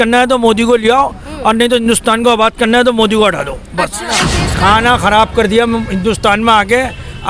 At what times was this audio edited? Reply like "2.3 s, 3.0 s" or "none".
4.3 s